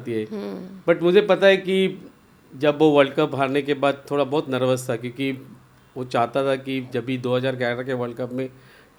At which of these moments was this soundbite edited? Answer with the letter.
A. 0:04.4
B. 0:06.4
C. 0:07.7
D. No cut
D